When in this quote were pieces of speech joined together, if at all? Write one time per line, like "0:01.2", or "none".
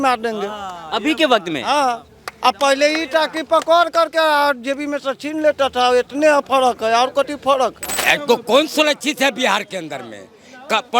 0:07.9